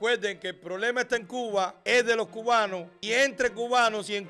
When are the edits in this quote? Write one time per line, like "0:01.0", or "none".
0:01.8
0:02.9